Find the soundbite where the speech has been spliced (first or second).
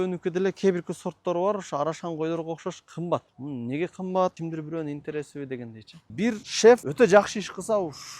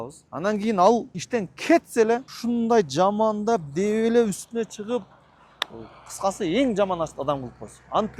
first